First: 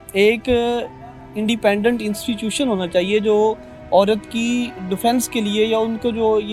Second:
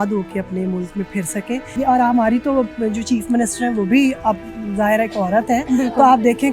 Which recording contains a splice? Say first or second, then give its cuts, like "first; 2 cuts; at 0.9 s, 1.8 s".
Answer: second; 1 cut; at 1.8 s